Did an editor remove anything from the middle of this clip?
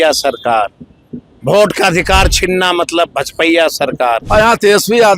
yes; 1 cut; at 4.2 s

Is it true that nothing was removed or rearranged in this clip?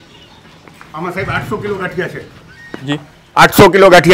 yes; 0 cuts

